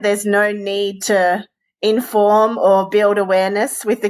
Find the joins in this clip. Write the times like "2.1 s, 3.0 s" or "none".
none